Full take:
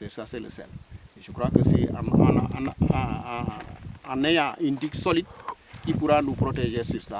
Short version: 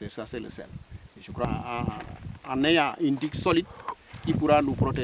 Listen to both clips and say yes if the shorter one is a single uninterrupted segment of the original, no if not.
no